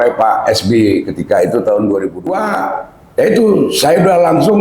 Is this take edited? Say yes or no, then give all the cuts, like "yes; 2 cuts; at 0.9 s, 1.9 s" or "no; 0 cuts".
yes; 1 cut; at 2.3 s